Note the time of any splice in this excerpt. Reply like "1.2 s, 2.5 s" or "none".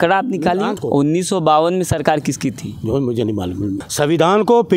0.7 s, 3.8 s